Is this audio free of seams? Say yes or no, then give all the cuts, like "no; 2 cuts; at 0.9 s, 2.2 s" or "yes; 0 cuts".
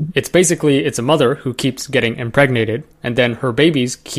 yes; 0 cuts